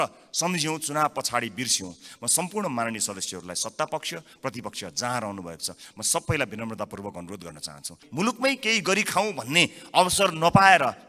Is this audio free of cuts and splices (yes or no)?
no